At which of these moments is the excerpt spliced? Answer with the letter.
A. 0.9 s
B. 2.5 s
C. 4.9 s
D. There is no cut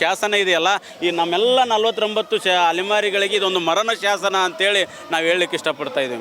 D